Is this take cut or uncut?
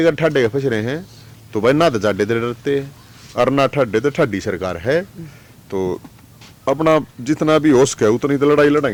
uncut